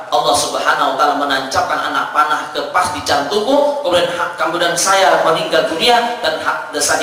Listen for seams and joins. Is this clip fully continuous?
yes; 0 cuts

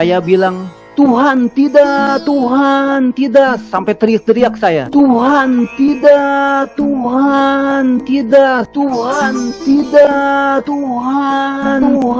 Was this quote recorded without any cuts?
yes; 0 cuts

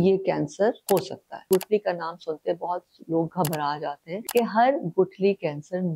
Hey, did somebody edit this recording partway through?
yes; 2 cuts; at 1.5 s, 4.2 s

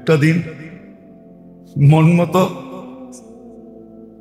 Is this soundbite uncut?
yes; 0 cuts

